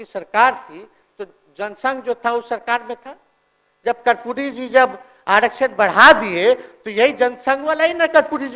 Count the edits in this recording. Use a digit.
0